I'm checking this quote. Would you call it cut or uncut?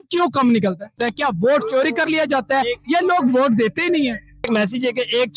cut